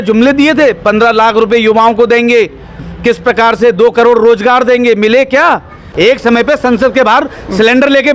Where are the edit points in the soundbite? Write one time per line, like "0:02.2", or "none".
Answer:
0:05.8